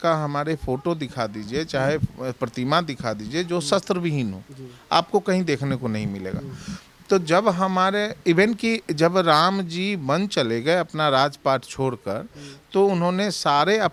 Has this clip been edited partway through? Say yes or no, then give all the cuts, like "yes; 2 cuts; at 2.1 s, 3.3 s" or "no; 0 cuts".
no; 0 cuts